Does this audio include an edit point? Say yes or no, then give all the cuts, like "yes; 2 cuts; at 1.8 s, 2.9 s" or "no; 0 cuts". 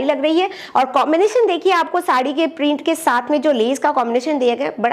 no; 0 cuts